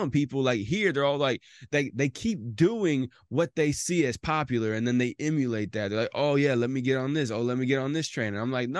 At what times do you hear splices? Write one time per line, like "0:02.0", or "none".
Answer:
none